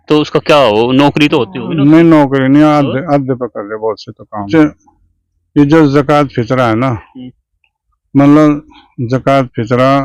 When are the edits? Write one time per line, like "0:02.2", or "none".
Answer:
0:04.5